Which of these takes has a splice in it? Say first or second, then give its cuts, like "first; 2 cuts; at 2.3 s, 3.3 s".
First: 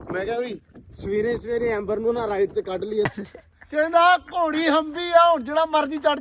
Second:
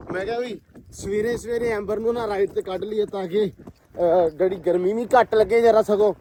first; 1 cut; at 3.1 s